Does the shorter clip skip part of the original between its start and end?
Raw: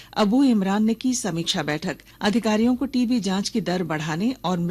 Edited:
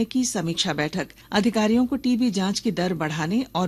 no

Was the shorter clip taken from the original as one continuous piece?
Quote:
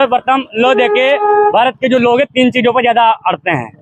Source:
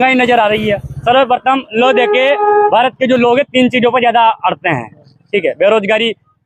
yes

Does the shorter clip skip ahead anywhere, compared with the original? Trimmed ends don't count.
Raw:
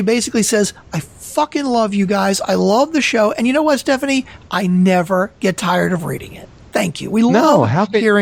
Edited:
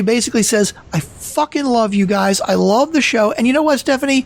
no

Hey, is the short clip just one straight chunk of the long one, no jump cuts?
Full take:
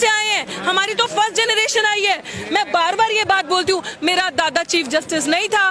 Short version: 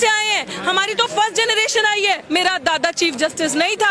no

